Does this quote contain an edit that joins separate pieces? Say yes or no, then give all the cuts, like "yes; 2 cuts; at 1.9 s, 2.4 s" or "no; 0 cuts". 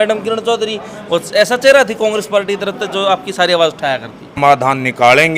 yes; 1 cut; at 4.3 s